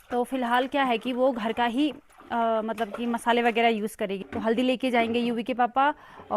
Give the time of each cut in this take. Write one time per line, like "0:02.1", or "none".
0:04.2